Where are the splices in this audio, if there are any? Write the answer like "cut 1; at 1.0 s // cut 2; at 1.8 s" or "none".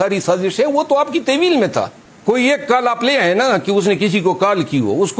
cut 1; at 2.0 s